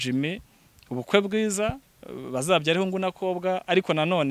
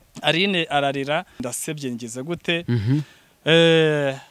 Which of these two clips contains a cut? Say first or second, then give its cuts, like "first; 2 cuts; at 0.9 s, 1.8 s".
second; 1 cut; at 1.4 s